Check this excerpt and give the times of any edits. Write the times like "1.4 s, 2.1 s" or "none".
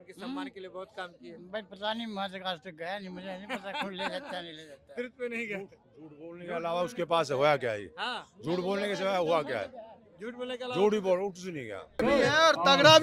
12.0 s